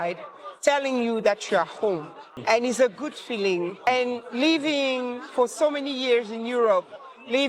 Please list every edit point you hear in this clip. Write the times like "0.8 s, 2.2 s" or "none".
2.4 s, 3.9 s